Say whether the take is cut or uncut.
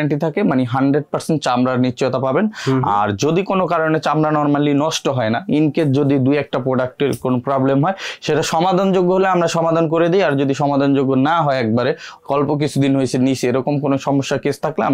uncut